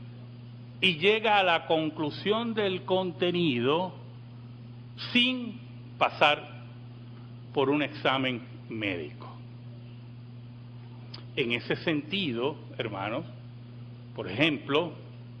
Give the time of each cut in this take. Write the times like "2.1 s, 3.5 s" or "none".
4.0 s